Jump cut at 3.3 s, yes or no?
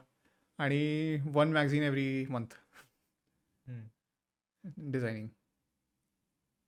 no